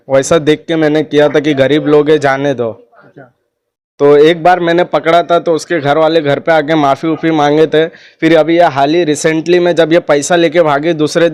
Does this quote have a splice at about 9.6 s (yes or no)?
no